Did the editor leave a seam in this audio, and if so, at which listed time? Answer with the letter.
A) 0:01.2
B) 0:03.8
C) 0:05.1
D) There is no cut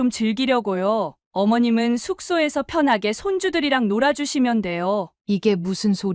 C